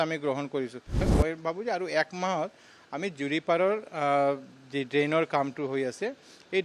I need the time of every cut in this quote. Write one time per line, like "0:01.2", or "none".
0:01.0